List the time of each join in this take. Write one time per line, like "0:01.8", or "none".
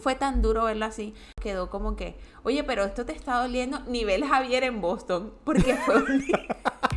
0:01.4

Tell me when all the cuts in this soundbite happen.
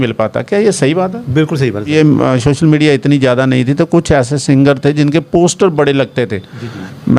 0:01.9

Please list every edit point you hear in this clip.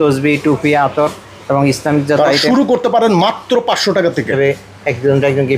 0:04.3

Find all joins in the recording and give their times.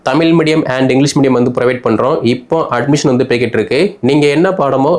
none

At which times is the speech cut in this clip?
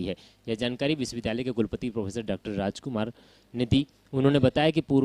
0:01.2
0:03.0

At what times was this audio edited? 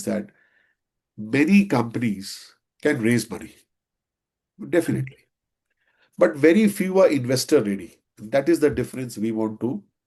none

